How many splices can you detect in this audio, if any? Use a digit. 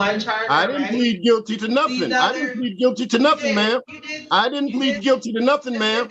0